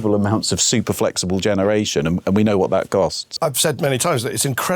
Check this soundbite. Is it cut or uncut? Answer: cut